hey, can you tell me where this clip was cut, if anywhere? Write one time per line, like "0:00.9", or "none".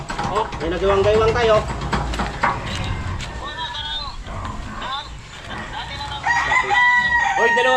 none